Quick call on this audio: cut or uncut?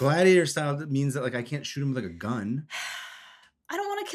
uncut